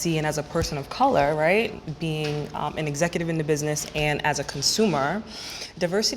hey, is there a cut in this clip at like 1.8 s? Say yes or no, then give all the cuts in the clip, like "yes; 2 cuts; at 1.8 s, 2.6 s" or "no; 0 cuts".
yes; 1 cut; at 1.8 s